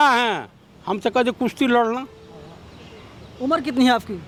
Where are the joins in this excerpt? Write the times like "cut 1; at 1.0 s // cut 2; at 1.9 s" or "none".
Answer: none